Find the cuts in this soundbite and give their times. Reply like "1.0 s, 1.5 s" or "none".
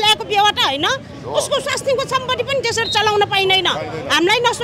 none